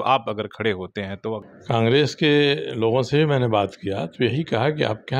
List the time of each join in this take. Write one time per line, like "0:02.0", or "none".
0:01.5